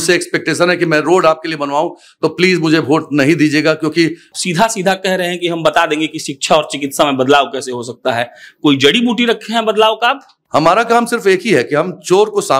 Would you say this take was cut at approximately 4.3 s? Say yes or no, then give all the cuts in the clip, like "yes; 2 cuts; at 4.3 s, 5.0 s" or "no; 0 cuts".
yes; 2 cuts; at 4.3 s, 10.3 s